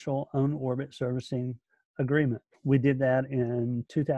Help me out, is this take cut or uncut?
cut